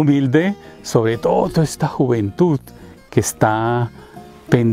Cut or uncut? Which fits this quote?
uncut